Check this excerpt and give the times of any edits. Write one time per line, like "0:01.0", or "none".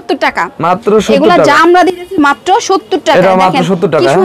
0:01.6